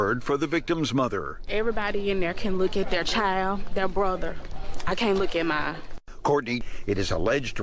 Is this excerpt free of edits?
no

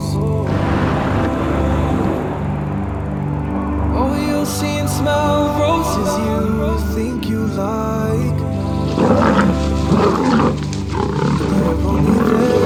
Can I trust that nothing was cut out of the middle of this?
yes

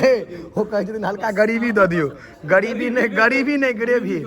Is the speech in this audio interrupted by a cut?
no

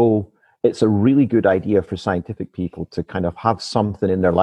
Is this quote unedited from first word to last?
yes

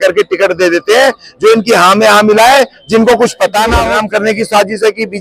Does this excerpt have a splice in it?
yes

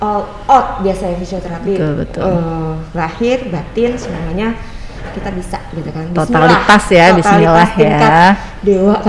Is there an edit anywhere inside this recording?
no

